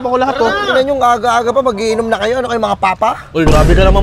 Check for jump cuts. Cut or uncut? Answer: uncut